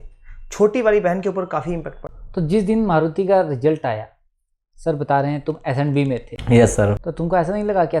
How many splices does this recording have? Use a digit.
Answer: 1